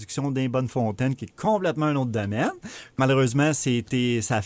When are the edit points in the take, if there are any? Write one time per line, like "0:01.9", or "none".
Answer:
0:03.0